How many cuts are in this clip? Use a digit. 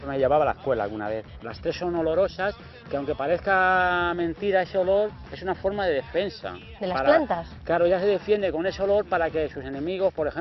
1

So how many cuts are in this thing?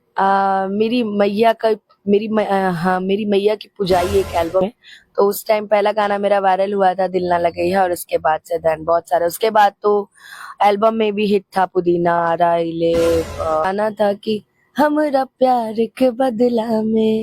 2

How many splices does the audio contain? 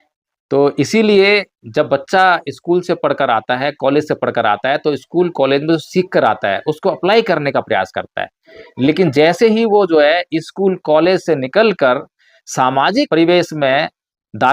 1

